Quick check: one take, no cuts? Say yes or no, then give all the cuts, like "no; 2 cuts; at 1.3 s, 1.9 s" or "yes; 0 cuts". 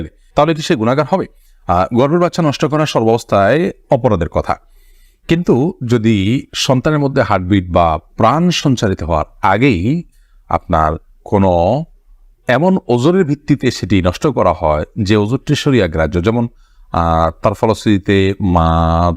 yes; 0 cuts